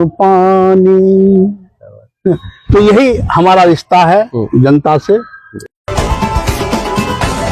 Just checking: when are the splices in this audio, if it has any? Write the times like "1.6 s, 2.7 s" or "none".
none